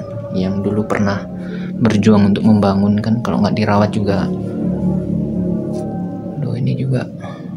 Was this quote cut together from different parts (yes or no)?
no